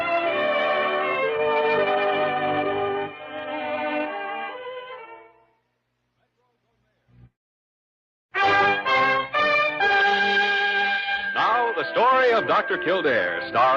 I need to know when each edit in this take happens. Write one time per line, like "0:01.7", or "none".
0:09.7